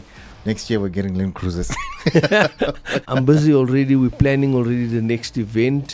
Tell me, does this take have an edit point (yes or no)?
yes